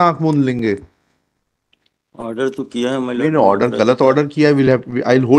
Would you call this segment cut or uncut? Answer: uncut